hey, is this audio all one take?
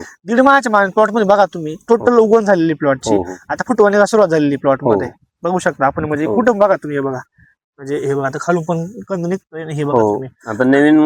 yes; 0 cuts

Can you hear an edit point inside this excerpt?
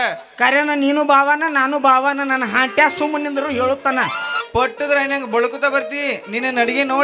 yes; 1 cut; at 4.3 s

